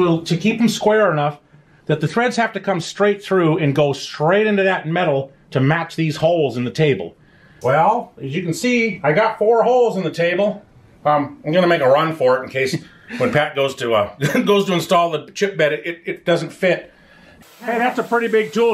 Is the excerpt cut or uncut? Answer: cut